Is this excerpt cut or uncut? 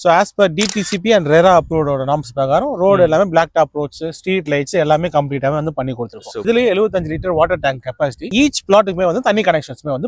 cut